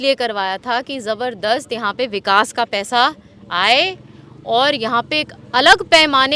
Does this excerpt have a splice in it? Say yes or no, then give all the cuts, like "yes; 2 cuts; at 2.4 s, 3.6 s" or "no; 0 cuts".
no; 0 cuts